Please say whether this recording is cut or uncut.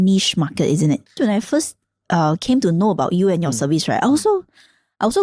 cut